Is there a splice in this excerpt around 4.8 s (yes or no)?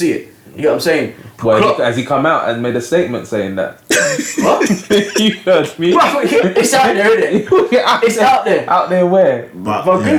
no